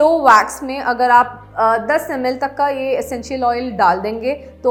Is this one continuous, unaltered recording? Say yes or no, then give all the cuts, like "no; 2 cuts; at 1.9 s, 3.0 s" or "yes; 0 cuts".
yes; 0 cuts